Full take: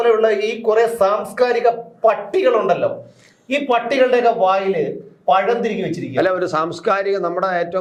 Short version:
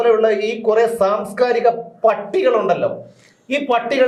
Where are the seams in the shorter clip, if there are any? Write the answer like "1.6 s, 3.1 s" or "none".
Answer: none